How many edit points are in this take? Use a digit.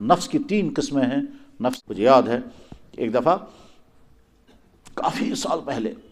1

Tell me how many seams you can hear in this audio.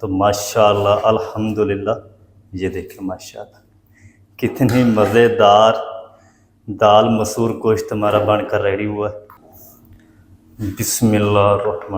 1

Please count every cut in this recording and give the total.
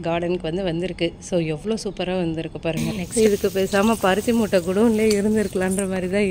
1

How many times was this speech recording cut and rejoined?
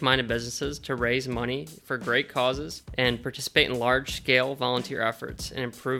1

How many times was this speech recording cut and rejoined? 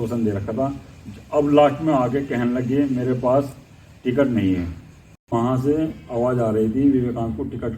1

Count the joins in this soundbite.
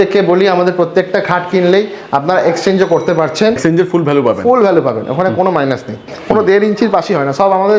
2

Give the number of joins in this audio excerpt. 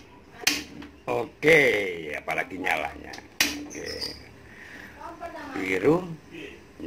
1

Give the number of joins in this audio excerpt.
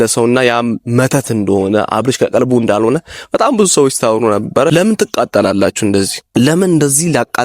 2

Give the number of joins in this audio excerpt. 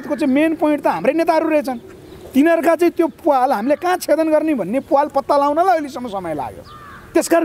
0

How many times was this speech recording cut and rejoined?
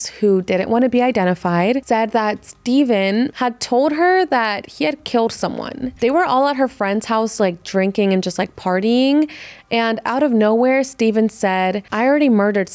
2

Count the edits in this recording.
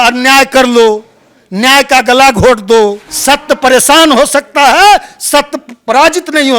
1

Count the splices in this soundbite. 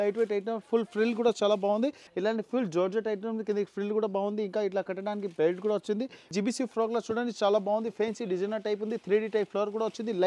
2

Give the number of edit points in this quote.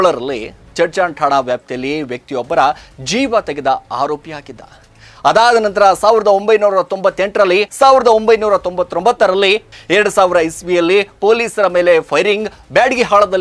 2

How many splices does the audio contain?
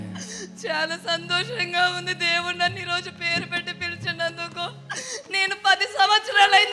0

